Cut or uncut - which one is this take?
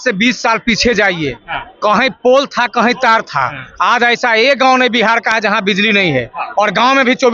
uncut